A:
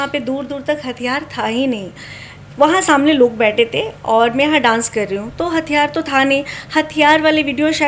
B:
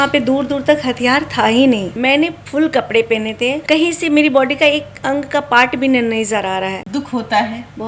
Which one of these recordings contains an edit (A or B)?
B